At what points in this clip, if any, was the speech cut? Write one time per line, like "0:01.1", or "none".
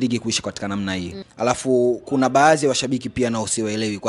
0:01.2